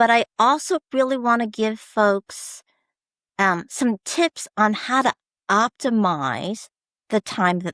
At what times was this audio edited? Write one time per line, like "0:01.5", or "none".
none